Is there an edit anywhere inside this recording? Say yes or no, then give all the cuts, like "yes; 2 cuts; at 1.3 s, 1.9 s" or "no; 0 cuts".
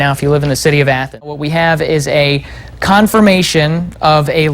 yes; 1 cut; at 1.3 s